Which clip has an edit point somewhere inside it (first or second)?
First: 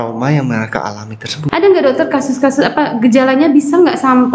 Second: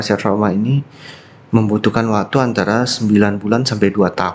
first